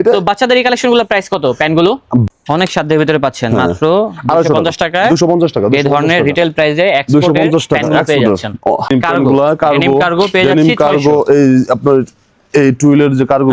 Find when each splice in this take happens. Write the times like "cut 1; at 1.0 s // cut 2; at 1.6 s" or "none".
cut 1; at 2.3 s // cut 2; at 8.9 s